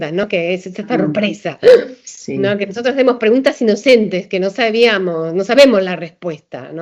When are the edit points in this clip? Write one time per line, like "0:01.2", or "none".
none